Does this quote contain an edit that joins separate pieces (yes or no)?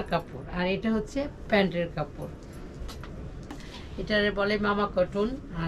yes